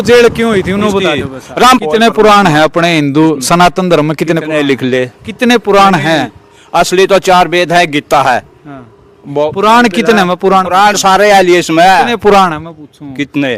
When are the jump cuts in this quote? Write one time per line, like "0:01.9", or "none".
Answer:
0:01.8